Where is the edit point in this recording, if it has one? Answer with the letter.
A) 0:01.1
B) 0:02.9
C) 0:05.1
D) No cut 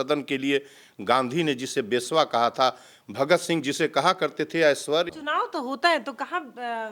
C